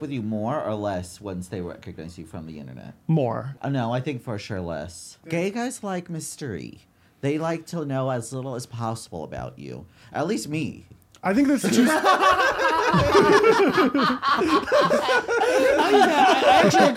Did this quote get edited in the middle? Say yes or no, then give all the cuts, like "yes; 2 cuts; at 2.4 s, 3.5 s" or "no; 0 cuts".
yes; 2 cuts; at 3.5 s, 5.3 s